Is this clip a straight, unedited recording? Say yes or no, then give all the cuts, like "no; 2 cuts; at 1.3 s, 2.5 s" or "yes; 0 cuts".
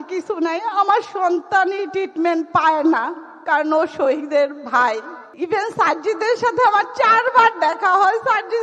no; 1 cut; at 5.2 s